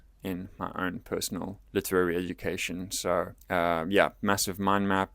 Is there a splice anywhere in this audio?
yes; 2 cuts; at 1.6 s, 3.4 s

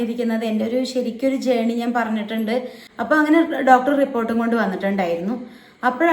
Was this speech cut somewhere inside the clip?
yes; 1 cut; at 2.8 s

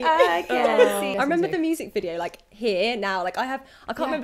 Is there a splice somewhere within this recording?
yes; 1 cut; at 1.1 s

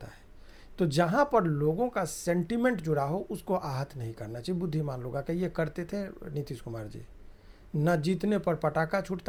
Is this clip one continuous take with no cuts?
yes; 0 cuts

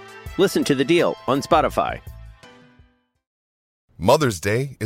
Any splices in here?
yes; 1 cut; at 3.7 s

